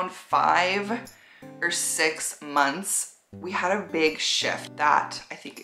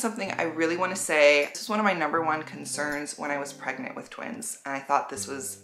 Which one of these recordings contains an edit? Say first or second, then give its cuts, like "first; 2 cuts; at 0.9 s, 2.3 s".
first; 1 cut; at 4.6 s